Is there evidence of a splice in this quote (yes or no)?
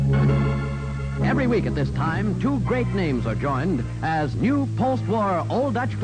yes